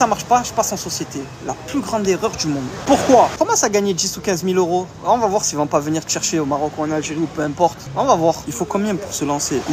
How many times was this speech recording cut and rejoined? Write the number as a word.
two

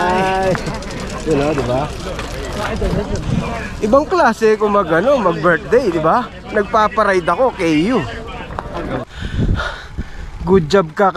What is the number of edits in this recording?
one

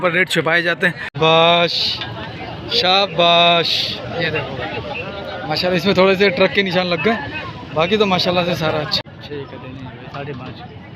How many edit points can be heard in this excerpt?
two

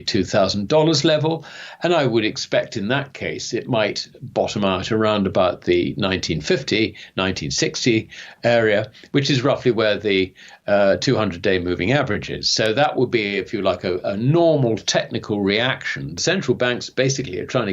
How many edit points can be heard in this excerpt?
one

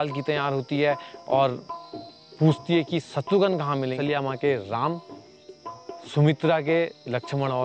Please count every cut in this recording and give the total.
one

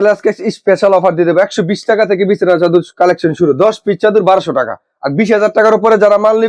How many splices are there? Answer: zero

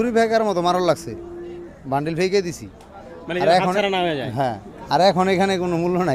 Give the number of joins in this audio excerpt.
zero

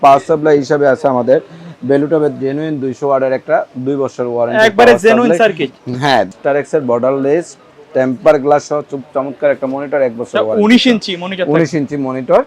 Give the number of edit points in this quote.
one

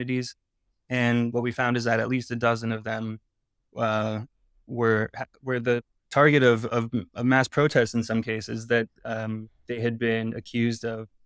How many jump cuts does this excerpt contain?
zero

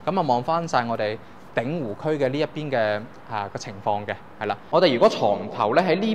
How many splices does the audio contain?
one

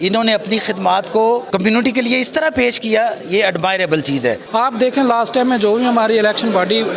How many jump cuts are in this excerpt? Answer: two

